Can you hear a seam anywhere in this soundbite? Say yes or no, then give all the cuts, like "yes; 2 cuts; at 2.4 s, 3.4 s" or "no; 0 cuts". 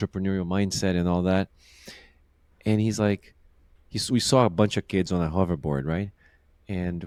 no; 0 cuts